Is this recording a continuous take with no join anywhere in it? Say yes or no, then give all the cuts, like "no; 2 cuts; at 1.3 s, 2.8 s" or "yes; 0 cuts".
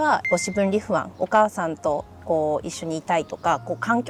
yes; 0 cuts